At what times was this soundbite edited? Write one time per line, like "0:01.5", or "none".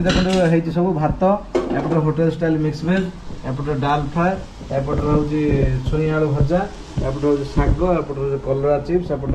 none